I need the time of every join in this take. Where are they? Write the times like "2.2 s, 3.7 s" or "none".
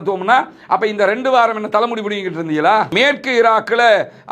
2.9 s